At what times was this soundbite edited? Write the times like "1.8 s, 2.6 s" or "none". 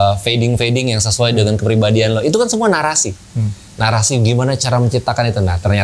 none